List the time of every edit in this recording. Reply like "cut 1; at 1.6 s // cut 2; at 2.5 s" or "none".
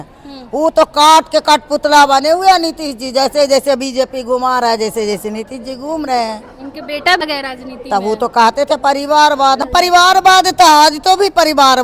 cut 1; at 7.2 s // cut 2; at 9.6 s